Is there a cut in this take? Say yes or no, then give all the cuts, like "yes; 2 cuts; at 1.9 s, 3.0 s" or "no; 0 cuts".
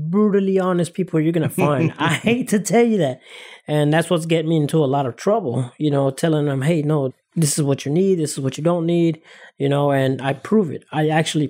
no; 0 cuts